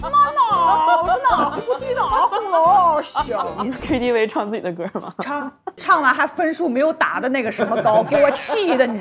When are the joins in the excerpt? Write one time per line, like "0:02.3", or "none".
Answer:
0:03.6